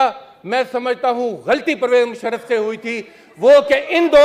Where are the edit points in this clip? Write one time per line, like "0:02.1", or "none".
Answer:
none